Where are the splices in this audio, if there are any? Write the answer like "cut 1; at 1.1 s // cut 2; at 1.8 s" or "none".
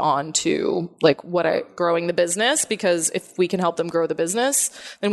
cut 1; at 1.7 s